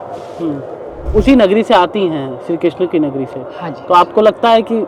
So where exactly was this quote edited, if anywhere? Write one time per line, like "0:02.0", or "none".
0:01.0